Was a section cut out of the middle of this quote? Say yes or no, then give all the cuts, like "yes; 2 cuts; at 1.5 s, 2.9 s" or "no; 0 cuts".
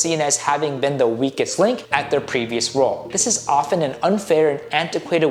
yes; 2 cuts; at 1.8 s, 3.1 s